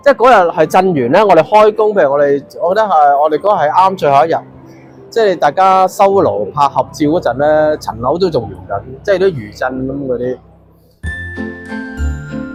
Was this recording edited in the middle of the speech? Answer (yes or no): no